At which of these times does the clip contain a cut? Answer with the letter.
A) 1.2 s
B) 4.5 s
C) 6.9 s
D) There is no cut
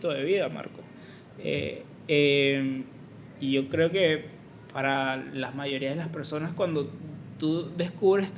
D